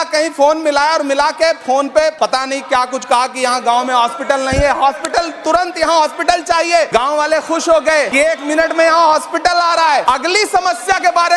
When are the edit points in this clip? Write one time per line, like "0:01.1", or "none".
0:02.1
0:06.9
0:08.2
0:10.0